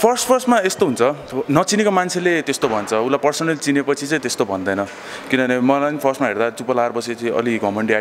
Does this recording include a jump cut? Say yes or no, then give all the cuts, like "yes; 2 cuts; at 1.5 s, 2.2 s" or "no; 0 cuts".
no; 0 cuts